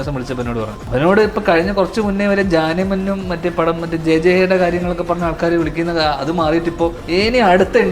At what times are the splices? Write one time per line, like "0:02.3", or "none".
0:00.9
0:07.0